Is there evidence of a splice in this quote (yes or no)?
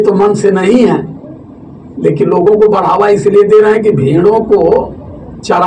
no